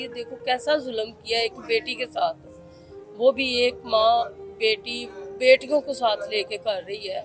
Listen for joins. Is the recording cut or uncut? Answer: uncut